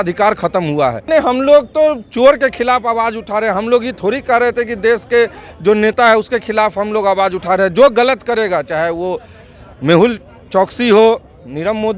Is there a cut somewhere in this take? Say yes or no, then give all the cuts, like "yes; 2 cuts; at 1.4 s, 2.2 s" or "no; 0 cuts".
yes; 1 cut; at 1.1 s